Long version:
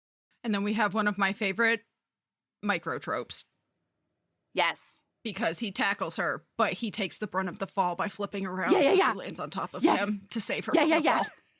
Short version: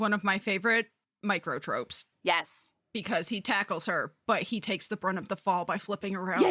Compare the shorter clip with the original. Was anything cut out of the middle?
yes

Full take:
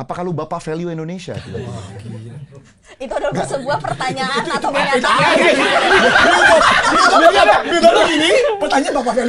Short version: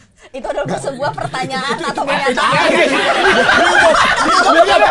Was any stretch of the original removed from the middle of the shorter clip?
no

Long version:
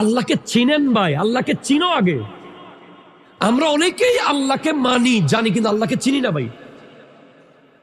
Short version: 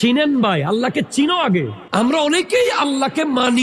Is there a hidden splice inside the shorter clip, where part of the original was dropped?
yes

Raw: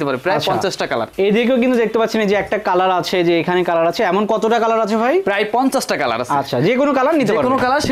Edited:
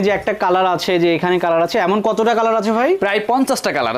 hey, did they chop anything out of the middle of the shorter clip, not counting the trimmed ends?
no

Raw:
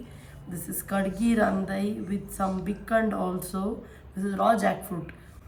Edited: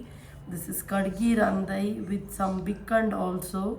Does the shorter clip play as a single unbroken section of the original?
yes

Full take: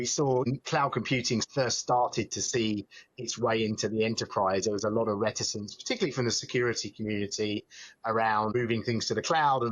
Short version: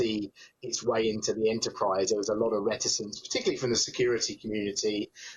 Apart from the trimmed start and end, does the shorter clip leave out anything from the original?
no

